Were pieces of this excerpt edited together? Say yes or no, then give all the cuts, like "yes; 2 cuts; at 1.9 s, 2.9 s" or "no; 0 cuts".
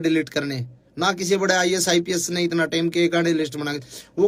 no; 0 cuts